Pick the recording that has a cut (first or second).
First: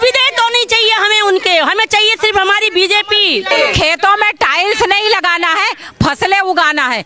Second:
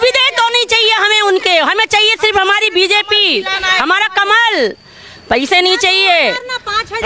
first